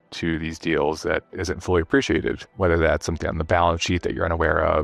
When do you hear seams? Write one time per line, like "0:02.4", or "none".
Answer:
0:02.5